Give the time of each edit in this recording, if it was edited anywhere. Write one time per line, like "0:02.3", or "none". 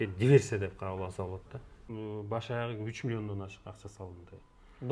0:01.8